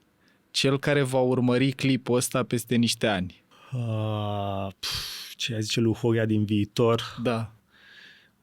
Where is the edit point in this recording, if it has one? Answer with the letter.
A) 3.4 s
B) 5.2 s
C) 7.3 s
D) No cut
A